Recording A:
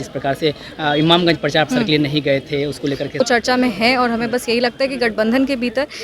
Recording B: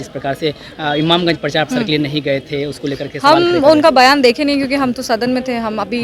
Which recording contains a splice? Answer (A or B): A